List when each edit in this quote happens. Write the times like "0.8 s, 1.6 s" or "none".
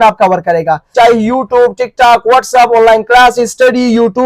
0.9 s